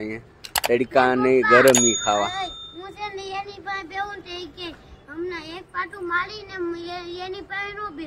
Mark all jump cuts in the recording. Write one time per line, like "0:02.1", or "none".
none